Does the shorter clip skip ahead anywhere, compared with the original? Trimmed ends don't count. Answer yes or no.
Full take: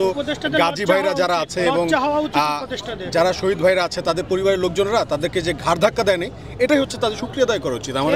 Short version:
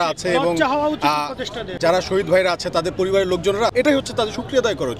yes